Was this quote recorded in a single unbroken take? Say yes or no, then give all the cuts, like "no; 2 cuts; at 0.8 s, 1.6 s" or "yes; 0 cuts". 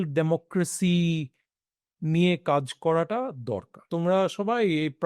no; 1 cut; at 3.8 s